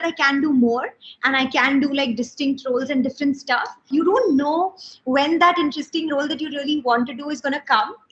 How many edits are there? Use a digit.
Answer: 1